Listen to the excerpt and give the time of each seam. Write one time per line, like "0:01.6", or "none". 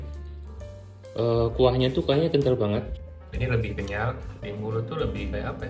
0:02.9
0:04.3